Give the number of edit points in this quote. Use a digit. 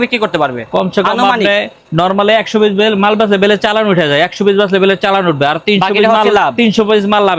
0